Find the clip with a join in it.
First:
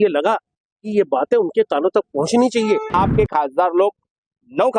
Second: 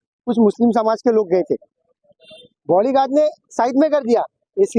first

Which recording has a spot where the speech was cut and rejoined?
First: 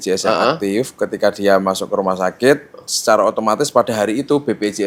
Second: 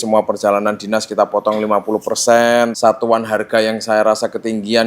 second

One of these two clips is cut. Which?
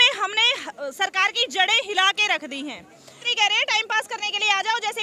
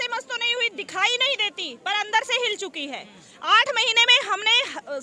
first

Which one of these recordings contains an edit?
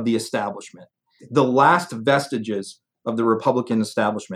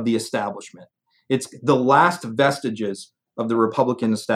first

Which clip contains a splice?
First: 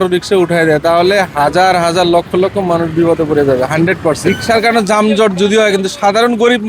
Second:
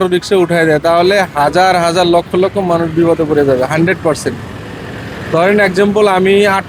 first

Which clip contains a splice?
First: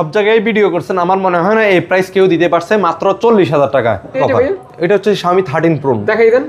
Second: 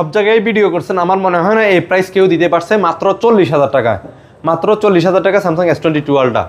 first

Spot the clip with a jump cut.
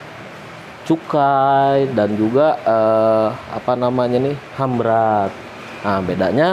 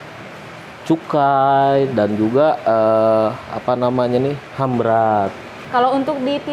second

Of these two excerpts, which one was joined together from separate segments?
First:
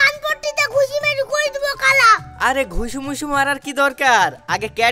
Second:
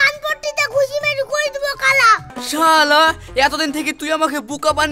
second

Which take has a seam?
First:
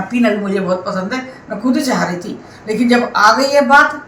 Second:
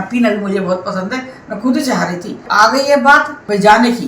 second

